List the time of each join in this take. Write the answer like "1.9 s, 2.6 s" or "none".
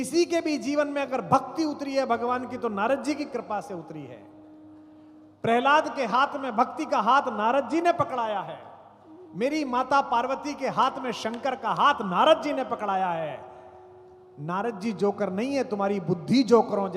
none